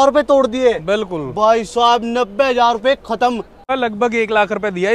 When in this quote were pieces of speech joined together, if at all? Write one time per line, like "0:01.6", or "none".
0:03.7